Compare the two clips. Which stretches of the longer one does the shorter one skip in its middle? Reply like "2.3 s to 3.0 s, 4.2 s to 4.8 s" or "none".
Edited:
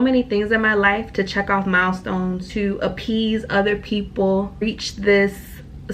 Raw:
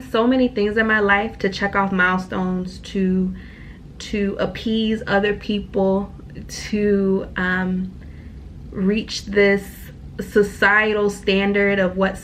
2.7 s to 4.0 s, 6.2 s to 8.9 s

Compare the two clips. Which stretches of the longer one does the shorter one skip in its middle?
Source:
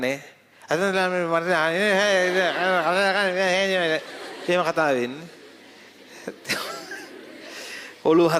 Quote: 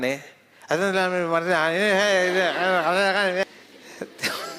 3.4 s to 5.7 s

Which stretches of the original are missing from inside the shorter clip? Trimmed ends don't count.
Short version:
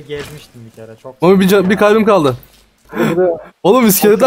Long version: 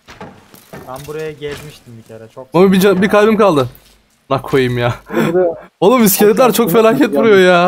4.1 s to 5.0 s

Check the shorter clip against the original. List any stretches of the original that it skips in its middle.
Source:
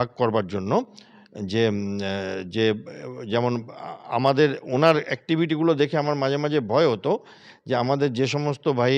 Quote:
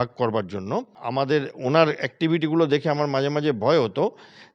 1.0 s to 4.0 s

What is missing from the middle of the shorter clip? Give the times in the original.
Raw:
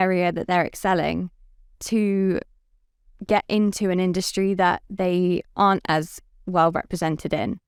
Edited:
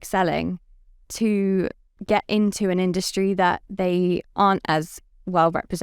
2.6 s to 3.1 s

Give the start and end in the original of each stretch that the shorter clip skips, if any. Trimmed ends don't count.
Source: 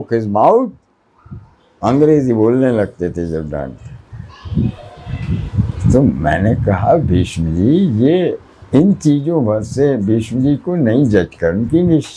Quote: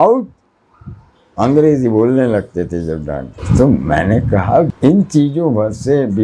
3.8 s to 5.7 s, 7.1 s to 8.6 s

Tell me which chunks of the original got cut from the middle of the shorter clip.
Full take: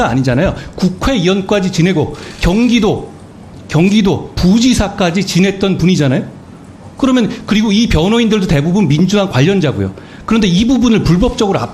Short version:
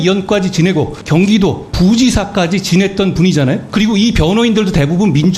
2.2 s to 3.6 s, 6.3 s to 7.4 s

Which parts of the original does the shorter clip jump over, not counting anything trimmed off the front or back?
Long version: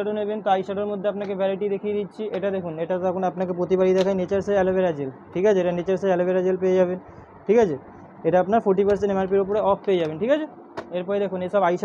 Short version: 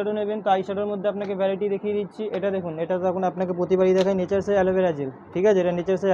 none

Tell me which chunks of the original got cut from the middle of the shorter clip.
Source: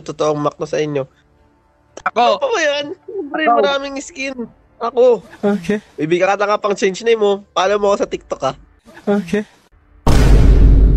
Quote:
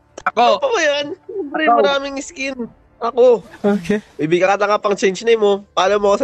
none

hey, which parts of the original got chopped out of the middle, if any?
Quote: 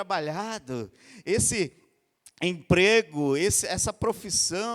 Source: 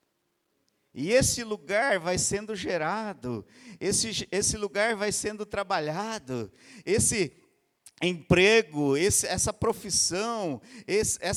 none

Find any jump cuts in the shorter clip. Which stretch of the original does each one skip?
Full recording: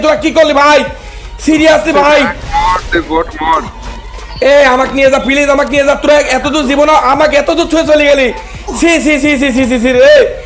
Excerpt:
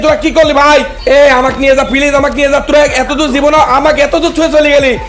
0.9 s to 4.3 s

